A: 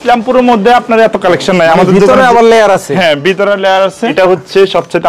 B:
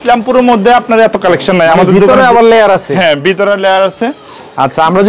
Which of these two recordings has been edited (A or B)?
A